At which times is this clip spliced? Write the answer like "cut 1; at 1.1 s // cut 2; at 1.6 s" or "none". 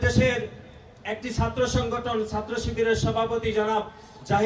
none